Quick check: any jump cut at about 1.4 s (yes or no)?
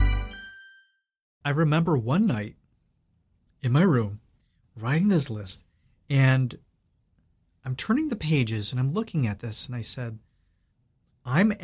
yes